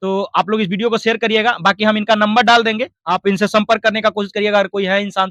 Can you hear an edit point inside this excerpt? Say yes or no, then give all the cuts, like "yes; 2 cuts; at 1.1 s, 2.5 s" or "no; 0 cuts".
no; 0 cuts